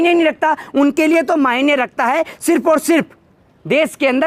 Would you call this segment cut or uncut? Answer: uncut